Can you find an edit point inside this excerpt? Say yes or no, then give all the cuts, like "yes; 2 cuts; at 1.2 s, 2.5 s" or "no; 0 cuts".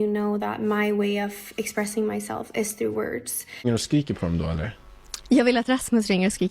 yes; 1 cut; at 3.7 s